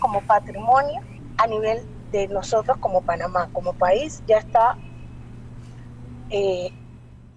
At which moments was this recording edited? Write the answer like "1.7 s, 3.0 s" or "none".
1.1 s